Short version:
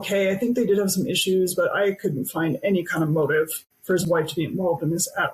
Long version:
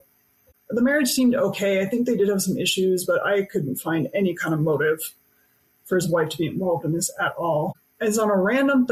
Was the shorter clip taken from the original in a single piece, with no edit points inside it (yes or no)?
no